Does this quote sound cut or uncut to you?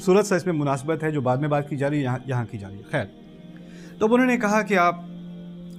uncut